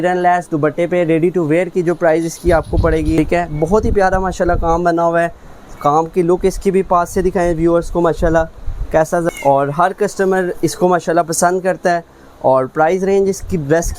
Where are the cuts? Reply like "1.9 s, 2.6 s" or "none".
3.2 s, 9.3 s